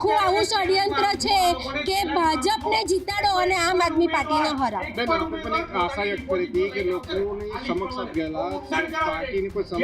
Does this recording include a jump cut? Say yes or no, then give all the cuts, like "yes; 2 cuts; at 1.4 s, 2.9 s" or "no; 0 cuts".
no; 0 cuts